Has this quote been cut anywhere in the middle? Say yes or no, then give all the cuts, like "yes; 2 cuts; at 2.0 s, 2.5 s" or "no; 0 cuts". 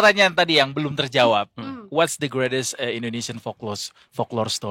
no; 0 cuts